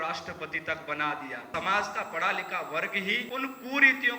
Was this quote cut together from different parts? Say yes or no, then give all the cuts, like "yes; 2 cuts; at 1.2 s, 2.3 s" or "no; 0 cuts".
yes; 2 cuts; at 1.5 s, 3.2 s